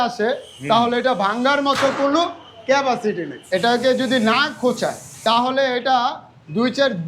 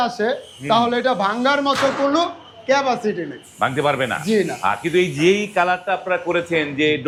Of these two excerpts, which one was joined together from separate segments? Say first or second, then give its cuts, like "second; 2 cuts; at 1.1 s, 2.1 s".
first; 2 cuts; at 3.8 s, 5.1 s